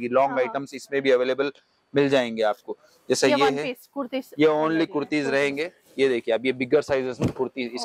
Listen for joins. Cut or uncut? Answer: uncut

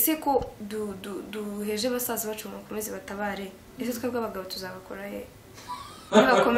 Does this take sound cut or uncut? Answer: uncut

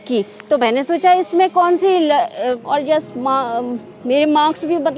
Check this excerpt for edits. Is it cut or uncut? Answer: cut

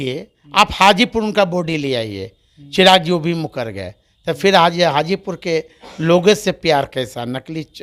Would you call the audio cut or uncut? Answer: uncut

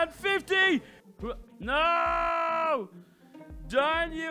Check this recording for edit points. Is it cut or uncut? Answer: cut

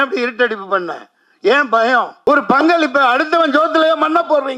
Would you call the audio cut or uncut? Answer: cut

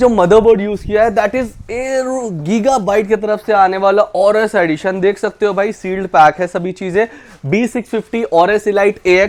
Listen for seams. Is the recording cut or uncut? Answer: uncut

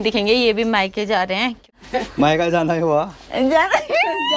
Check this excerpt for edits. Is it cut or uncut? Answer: cut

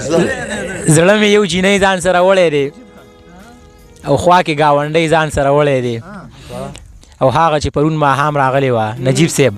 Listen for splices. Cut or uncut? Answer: uncut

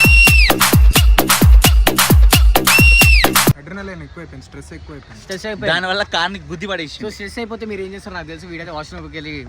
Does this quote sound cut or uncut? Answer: cut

